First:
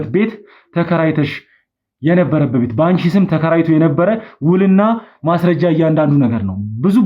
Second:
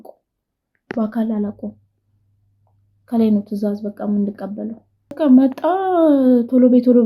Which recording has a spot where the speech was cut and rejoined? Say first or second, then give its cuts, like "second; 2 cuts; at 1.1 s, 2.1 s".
second; 1 cut; at 5.1 s